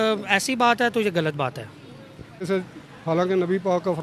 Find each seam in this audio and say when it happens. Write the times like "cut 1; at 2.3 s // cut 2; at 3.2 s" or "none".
cut 1; at 2.5 s